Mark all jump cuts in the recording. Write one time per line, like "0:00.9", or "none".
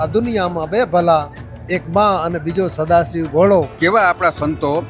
0:03.7